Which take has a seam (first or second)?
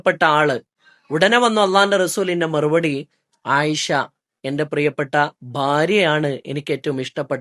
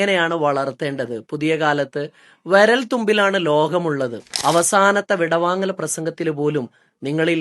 second